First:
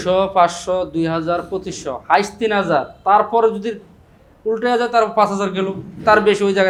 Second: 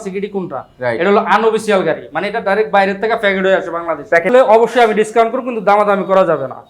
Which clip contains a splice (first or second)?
second